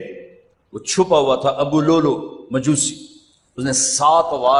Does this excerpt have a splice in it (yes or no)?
no